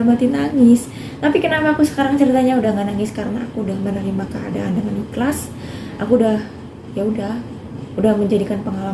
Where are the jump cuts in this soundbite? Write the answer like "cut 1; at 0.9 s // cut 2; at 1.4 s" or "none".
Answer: none